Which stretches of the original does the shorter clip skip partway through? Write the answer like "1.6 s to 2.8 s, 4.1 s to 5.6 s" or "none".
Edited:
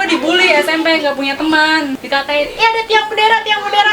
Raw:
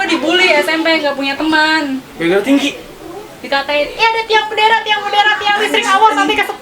2.0 s to 3.4 s